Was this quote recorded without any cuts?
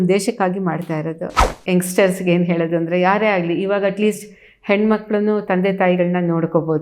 no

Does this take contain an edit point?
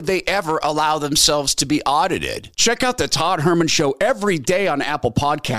no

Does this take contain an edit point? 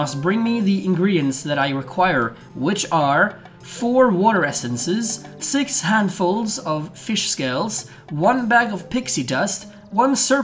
no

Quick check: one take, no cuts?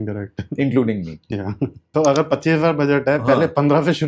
no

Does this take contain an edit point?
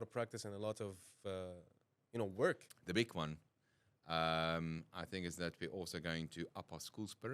yes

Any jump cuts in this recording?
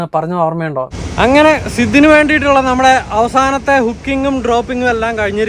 yes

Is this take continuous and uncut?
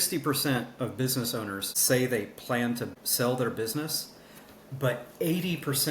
no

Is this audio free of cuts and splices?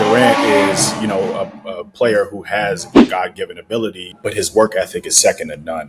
no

